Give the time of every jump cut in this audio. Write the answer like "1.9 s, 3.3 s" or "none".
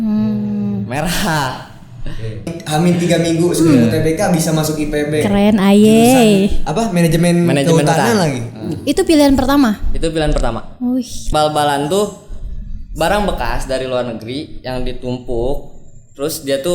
2.5 s, 11.2 s